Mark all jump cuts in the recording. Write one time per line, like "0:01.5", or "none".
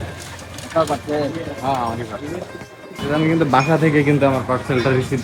none